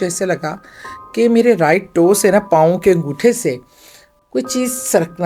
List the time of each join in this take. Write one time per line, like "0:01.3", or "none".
none

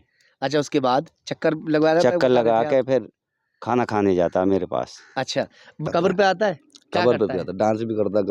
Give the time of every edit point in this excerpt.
0:05.8

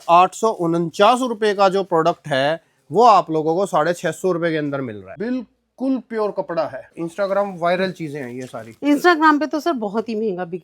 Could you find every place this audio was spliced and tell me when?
0:05.1
0:06.8

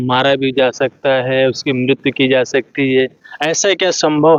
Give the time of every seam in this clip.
none

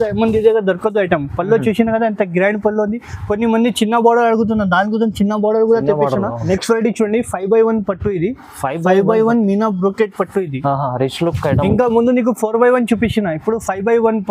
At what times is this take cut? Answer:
0:06.4

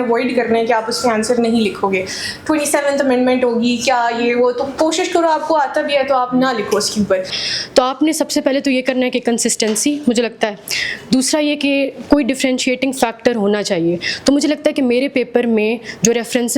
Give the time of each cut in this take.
0:07.4

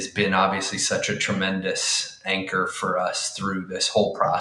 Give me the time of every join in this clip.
none

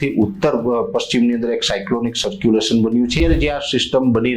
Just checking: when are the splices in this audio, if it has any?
0:03.2

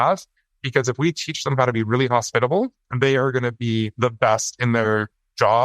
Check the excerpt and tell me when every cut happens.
0:02.8
0:03.9

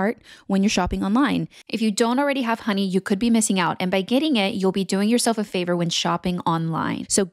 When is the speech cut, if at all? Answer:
0:01.6

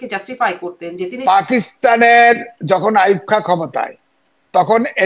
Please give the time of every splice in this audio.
0:01.2

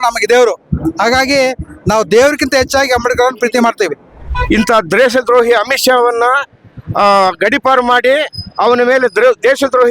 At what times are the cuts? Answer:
0:04.3

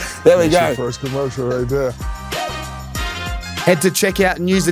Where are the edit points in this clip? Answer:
0:02.0
0:03.6

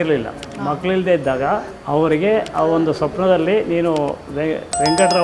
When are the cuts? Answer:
none

